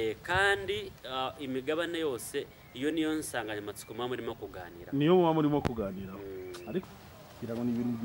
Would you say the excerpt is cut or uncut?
cut